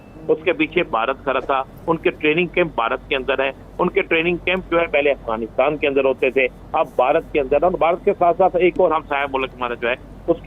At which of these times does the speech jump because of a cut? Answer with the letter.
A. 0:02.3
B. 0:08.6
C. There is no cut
C